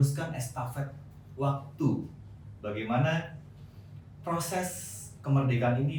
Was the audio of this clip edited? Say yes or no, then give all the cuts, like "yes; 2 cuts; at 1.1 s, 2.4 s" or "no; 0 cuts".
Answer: no; 0 cuts